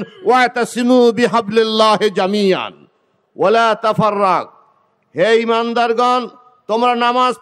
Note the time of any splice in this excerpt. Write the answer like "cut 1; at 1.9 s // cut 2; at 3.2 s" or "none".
none